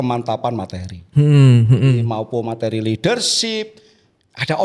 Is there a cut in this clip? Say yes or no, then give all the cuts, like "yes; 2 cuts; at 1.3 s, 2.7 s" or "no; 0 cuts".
no; 0 cuts